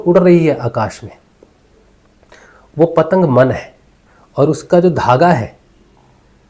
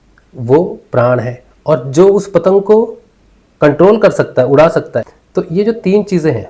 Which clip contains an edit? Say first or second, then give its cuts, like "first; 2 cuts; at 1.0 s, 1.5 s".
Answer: second; 1 cut; at 5.1 s